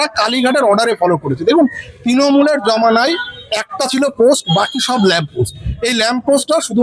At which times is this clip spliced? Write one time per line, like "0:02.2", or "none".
none